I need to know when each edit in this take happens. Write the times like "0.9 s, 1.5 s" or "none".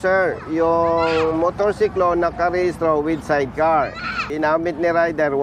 4.2 s